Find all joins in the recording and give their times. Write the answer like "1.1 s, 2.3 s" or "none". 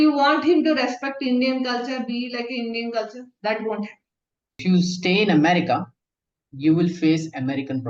4.6 s